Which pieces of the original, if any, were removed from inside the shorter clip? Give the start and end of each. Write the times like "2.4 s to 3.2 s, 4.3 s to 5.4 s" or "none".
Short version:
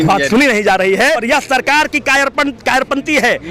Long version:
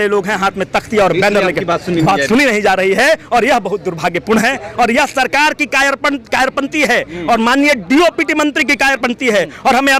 3.2 s to 4.9 s